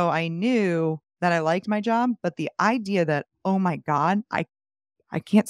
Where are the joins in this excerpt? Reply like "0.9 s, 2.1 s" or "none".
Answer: none